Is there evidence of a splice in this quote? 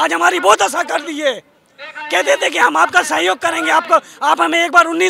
no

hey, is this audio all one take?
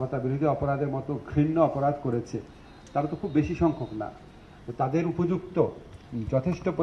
yes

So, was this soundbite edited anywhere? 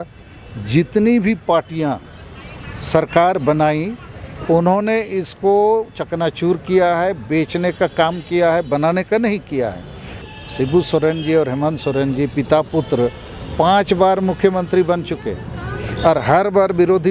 yes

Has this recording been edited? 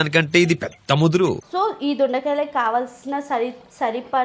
yes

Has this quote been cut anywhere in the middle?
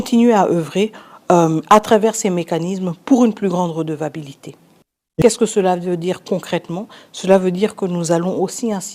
yes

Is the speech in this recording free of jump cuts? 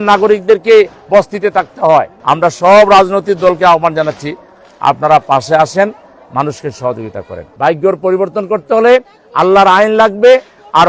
no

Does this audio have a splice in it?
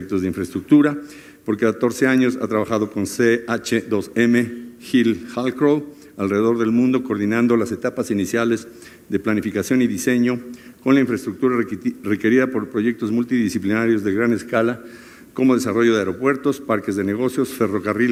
no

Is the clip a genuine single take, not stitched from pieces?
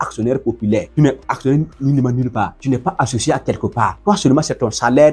no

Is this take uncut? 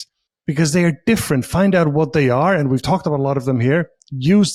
yes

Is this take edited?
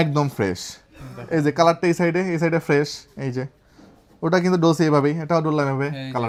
no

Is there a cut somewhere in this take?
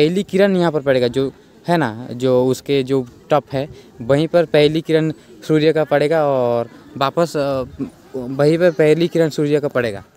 no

